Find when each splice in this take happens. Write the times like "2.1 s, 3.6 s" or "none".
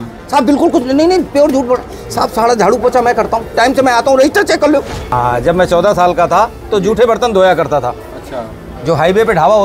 5.1 s